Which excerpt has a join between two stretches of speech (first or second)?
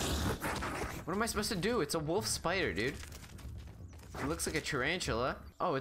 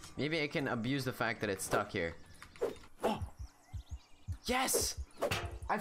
second